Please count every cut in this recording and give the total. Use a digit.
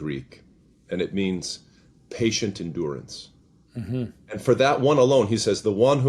0